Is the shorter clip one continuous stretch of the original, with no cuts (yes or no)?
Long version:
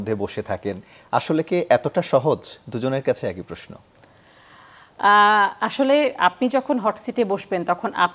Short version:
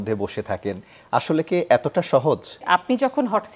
no